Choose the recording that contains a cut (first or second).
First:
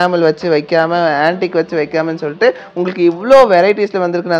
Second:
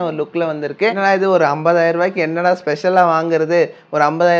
second